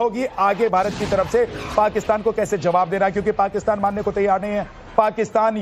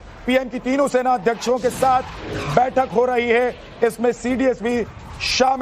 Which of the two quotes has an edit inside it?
second; 1 cut; at 1.2 s

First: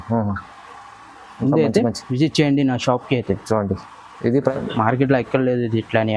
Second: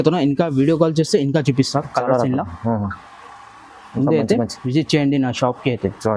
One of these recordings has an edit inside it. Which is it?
first; 1 cut; at 4.5 s

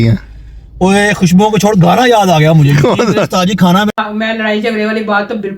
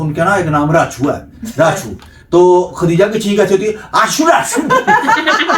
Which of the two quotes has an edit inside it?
first; 1 cut; at 3.9 s

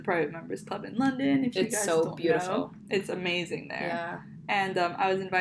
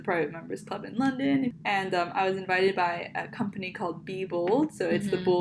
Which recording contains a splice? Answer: second; 1 cut; at 1.5 s

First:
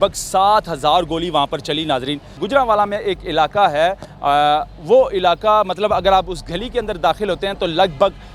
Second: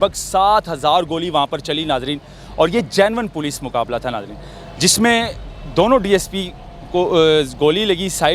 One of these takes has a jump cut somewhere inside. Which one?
first; 1 cut; at 2.3 s

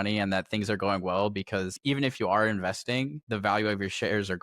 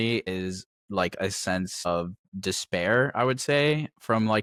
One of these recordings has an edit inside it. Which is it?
first; 2 cuts; at 1.8 s, 3.2 s

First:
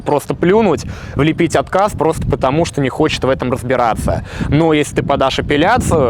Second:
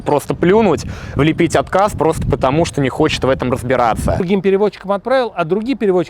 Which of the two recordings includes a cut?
second; 1 cut; at 4.2 s

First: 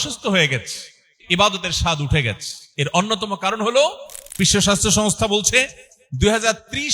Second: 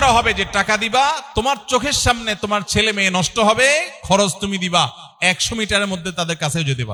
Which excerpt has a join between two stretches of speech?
first; 2 cuts; at 1.1 s, 4.4 s

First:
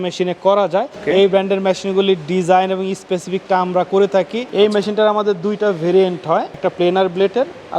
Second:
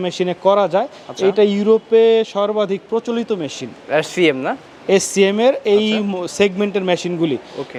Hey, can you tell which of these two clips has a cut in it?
first; 3 cuts; at 0.9 s, 4.4 s, 6.6 s

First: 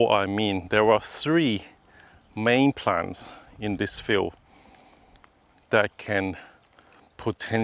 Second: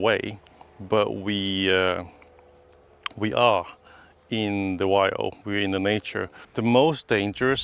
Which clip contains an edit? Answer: second; 1 cut; at 6.4 s

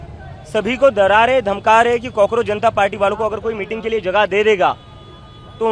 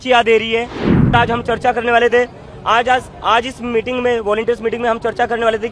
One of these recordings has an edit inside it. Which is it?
second; 1 cut; at 1.1 s

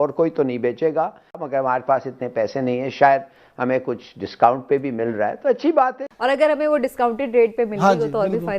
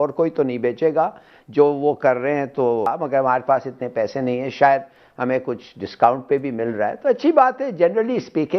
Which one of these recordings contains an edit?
first; 2 cuts; at 1.4 s, 6.1 s

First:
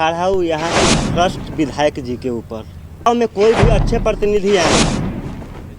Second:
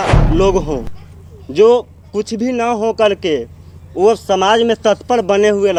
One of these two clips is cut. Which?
first; 1 cut; at 3.1 s

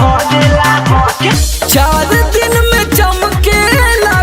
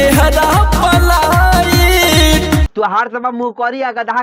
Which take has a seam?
first; 1 cut; at 1.4 s

